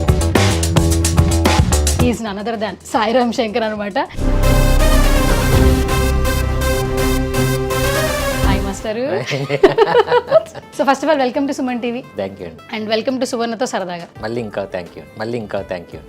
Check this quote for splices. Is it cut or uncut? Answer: cut